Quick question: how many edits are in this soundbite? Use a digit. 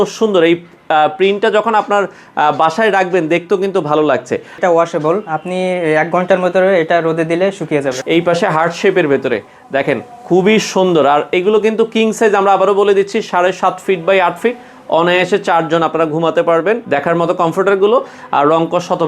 3